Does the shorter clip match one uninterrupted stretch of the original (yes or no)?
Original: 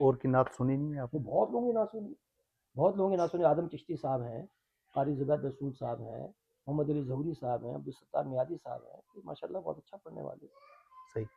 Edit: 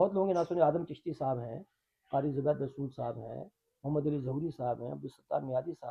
yes